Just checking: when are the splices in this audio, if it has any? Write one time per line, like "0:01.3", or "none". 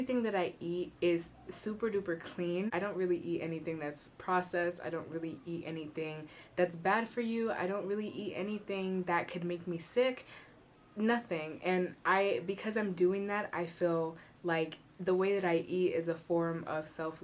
0:02.7